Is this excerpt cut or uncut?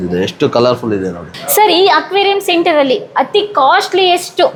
uncut